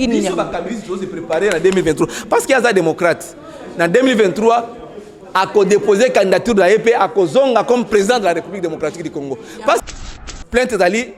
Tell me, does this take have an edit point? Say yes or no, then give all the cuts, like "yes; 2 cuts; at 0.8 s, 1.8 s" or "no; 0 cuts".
yes; 1 cut; at 9.9 s